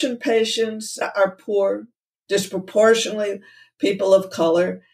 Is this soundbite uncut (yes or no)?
no